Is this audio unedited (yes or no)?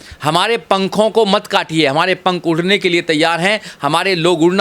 yes